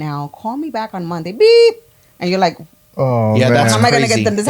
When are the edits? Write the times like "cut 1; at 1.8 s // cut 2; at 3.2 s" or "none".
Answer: none